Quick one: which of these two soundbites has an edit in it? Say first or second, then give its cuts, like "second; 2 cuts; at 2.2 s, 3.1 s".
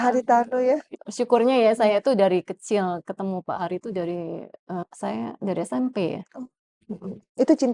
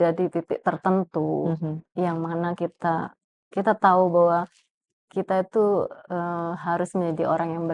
first; 2 cuts; at 0.9 s, 4.8 s